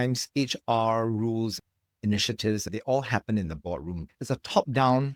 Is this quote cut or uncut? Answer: uncut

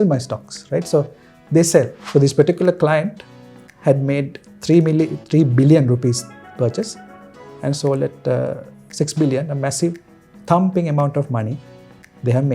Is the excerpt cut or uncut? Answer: cut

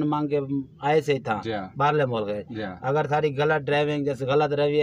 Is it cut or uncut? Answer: uncut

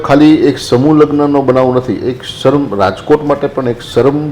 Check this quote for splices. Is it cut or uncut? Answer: uncut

